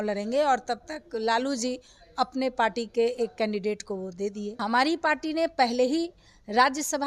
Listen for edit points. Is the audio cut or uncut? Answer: cut